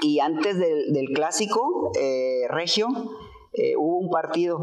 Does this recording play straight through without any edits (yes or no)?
yes